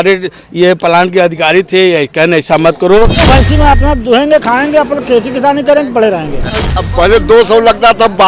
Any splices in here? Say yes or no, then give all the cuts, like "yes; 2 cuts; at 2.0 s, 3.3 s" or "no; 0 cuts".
yes; 2 cuts; at 3.2 s, 6.7 s